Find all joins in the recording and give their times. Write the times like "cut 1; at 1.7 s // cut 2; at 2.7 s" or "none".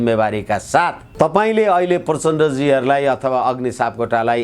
cut 1; at 1.0 s